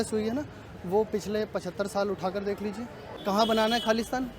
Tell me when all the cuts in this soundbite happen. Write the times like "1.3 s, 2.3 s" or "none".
3.1 s

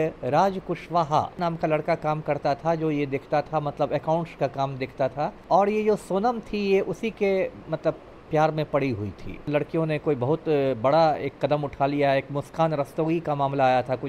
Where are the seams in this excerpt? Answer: 1.4 s, 5.4 s, 9.5 s

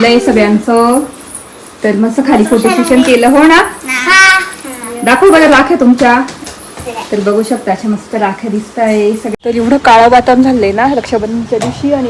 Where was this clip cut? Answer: 9.3 s

